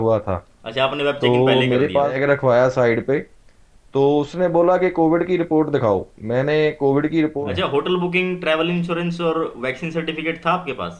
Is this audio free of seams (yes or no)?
no